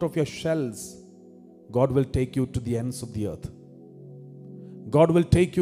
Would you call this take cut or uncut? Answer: uncut